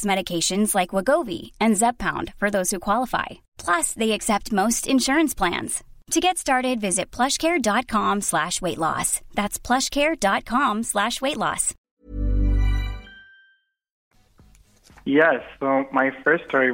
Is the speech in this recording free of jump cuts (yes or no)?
yes